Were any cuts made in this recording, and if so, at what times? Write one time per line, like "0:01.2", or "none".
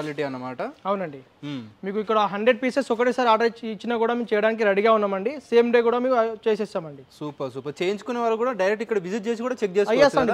none